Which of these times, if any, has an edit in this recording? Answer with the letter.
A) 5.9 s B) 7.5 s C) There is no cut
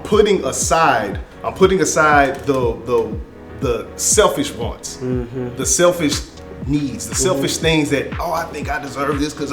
C